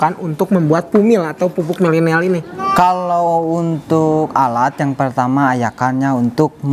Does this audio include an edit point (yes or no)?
no